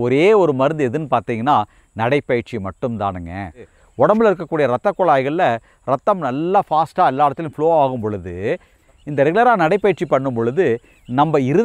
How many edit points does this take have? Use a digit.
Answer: 2